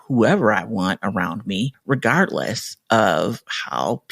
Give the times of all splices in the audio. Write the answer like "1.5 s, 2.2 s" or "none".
1.8 s

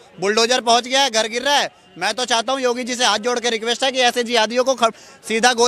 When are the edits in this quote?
none

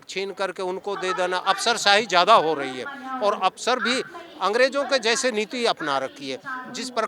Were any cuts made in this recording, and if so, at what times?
none

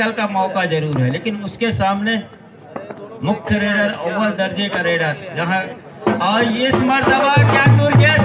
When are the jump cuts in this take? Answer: none

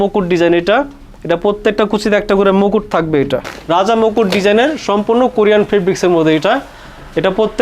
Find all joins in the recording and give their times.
3.6 s

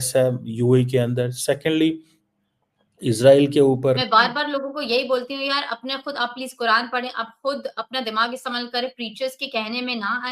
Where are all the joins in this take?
4.0 s

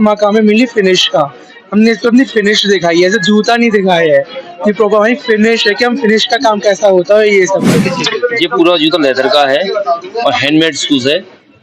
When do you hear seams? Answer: 7.8 s

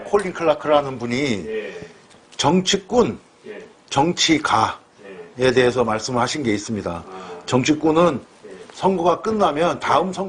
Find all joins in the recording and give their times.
none

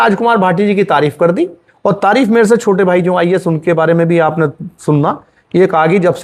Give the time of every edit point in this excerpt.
none

